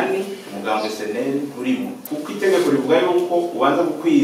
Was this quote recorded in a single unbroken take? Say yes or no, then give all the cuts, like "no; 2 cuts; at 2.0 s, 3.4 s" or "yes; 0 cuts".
no; 1 cut; at 2.0 s